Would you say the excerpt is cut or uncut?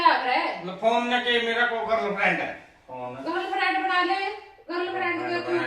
uncut